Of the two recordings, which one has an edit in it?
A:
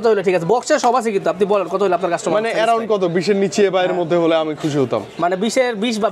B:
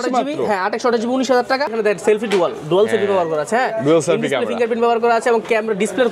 B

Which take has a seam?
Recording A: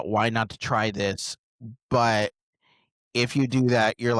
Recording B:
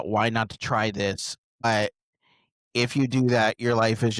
B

